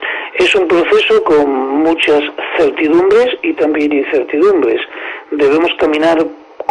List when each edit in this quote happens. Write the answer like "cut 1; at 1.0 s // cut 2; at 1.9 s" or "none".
cut 1; at 3.9 s